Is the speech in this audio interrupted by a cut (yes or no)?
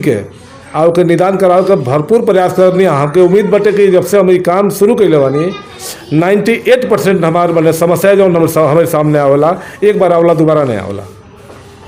no